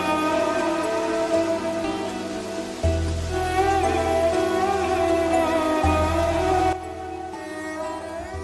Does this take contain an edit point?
no; 0 cuts

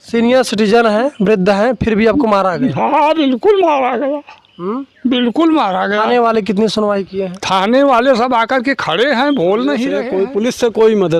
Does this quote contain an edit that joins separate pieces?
yes; 1 cut; at 10.0 s

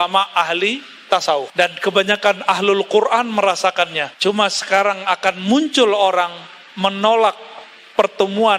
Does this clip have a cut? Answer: yes; 2 cuts; at 1.5 s, 4.1 s

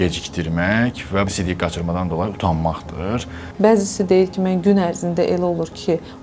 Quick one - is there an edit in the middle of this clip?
yes; 2 cuts; at 1.3 s, 3.3 s

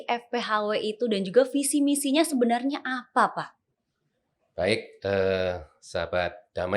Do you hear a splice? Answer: no; 0 cuts

